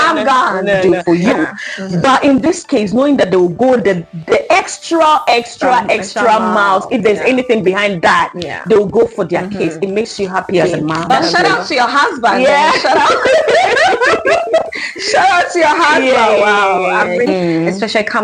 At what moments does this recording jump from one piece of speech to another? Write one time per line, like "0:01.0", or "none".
0:00.8
0:11.1
0:17.3